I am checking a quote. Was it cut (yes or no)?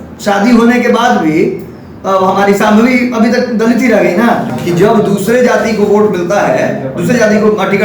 yes